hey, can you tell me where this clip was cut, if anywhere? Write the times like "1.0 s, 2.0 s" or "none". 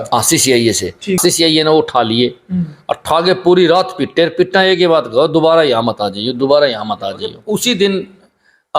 1.2 s, 7.5 s